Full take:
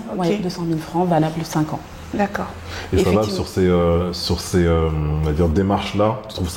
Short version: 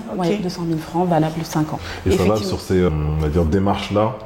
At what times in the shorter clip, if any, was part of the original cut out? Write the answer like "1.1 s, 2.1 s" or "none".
1.9 s, 2.9 s